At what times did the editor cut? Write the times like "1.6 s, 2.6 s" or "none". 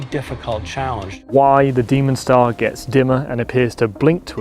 1.1 s